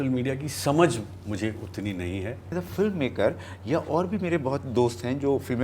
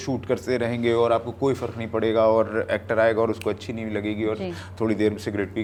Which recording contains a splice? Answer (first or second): first